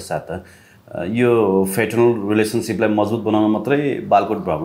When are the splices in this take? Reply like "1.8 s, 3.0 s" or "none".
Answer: none